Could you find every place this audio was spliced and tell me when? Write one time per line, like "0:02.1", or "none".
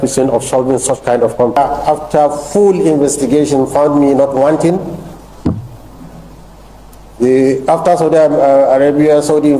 0:01.6